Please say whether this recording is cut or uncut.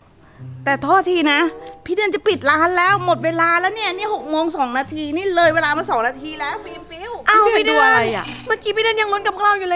uncut